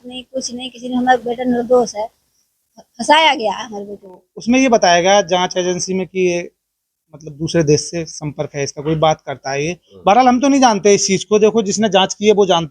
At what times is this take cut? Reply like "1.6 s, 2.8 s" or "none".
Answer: 4.3 s